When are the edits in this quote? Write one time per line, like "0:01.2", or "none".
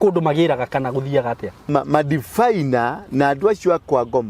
0:01.7